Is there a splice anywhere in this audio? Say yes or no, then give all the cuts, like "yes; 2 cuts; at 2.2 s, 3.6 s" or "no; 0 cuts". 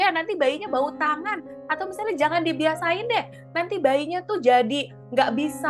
no; 0 cuts